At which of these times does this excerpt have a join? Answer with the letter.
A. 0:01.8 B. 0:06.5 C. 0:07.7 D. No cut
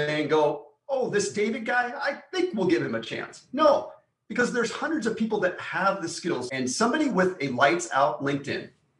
B